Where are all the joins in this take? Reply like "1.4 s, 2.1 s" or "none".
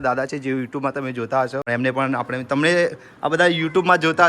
1.7 s